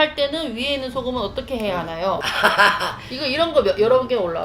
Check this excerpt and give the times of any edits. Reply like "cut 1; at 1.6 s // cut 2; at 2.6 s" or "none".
cut 1; at 2.2 s